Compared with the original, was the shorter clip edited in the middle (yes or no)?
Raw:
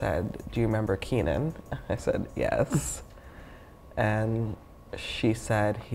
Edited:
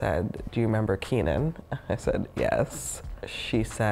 yes